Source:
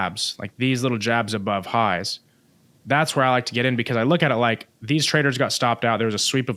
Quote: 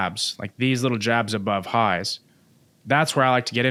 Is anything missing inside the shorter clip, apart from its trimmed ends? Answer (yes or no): no